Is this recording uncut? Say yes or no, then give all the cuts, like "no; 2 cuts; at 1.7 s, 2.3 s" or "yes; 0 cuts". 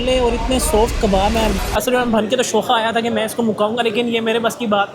no; 1 cut; at 1.6 s